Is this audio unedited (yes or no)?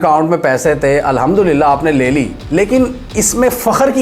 yes